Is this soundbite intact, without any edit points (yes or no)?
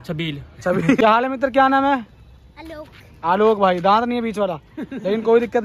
no